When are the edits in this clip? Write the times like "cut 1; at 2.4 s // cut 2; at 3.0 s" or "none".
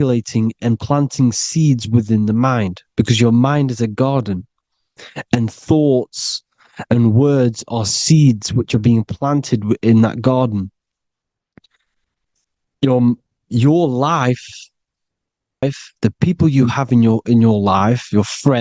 cut 1; at 15.6 s